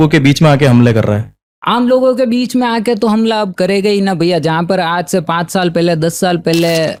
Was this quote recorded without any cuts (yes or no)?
yes